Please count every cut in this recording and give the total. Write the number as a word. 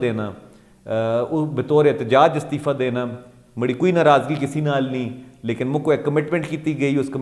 zero